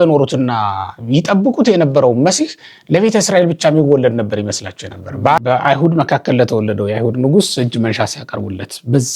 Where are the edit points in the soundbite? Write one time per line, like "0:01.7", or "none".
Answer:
0:05.4